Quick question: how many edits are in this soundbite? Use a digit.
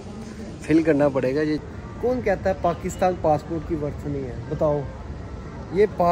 1